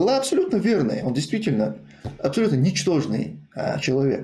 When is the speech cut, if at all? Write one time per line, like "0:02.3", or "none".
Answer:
none